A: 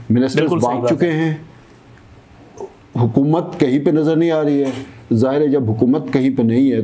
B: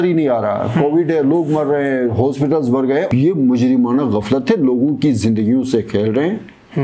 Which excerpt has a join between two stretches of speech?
B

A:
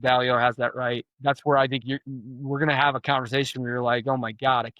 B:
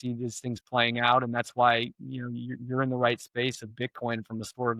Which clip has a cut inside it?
A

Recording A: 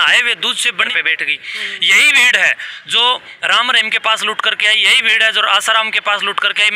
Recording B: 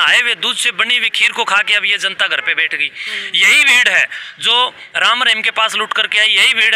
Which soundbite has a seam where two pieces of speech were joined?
A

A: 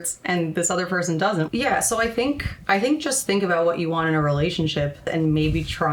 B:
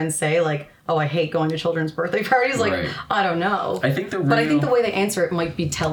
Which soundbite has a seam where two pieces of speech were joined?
A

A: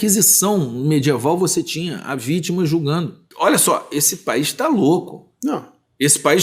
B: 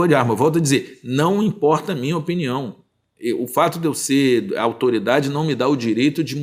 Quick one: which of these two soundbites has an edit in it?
A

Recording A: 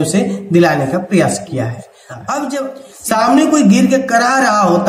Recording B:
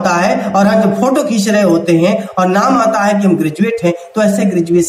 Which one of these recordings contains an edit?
A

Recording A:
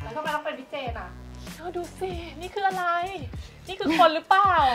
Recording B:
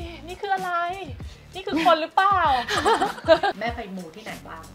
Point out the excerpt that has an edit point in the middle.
B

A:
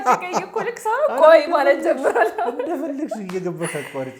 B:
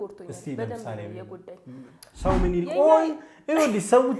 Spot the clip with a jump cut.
B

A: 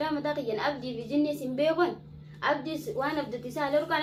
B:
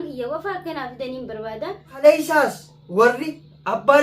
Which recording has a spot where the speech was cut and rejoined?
B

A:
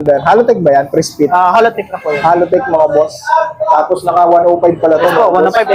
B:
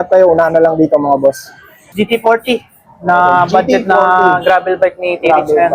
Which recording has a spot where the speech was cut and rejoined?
B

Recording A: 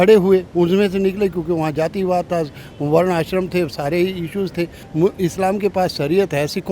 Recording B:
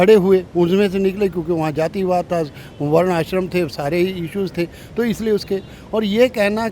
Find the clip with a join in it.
A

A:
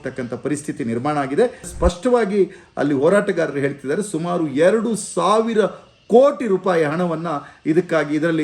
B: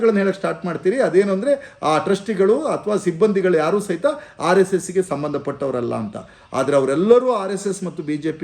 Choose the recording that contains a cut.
A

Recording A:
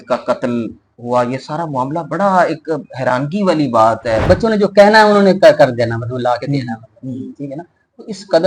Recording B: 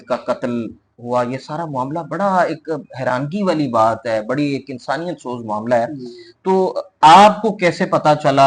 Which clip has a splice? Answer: A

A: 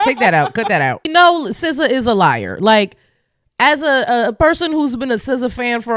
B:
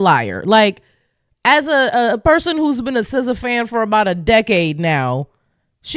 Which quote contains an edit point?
A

